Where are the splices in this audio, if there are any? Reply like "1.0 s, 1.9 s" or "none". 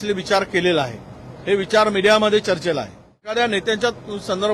3.3 s